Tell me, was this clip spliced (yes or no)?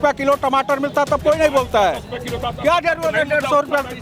no